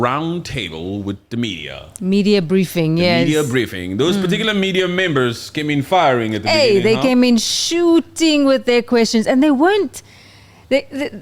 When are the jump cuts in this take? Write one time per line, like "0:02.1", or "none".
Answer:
none